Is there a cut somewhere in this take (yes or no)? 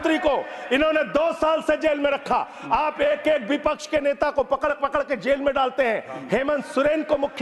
no